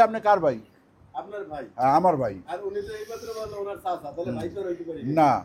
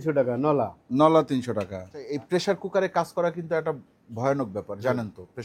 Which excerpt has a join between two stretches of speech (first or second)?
second